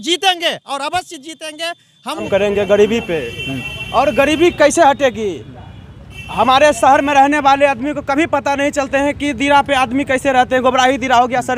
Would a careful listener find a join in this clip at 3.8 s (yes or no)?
no